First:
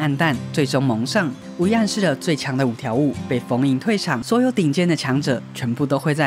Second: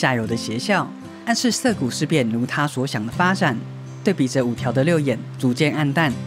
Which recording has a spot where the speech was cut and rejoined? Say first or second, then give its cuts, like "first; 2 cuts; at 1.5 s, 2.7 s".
first; 2 cuts; at 1.4 s, 4.2 s